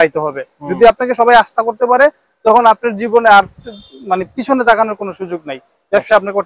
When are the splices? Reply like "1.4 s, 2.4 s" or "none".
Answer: none